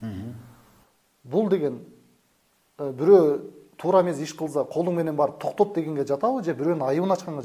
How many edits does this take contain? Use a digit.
0